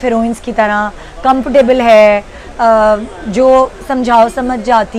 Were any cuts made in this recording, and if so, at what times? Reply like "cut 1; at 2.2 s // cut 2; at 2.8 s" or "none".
none